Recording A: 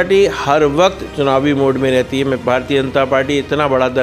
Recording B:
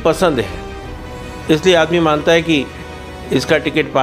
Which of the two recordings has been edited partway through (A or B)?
A